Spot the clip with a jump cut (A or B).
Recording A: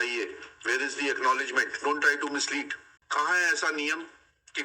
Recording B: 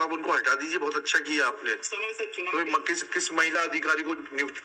A